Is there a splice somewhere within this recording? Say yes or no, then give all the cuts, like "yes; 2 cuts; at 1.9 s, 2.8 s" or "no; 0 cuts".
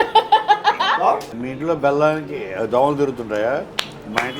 yes; 1 cut; at 1.3 s